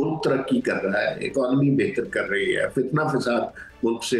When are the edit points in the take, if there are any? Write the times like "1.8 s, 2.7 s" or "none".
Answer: none